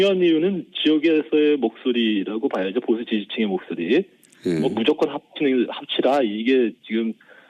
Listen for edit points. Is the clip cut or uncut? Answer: cut